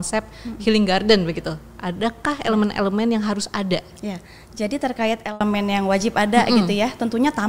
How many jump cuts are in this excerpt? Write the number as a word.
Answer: zero